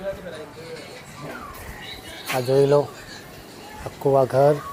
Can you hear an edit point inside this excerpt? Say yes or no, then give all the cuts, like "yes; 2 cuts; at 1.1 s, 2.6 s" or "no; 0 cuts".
no; 0 cuts